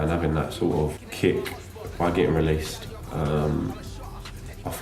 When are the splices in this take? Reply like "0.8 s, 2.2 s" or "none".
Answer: none